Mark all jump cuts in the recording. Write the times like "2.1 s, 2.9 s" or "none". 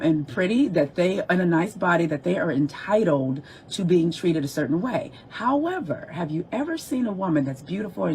5.2 s